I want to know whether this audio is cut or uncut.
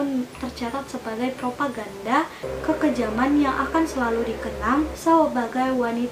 uncut